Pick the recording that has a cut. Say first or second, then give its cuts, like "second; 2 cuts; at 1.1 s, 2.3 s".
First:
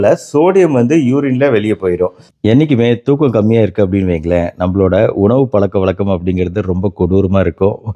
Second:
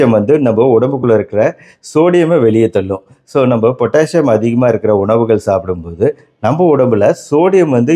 first; 1 cut; at 2.3 s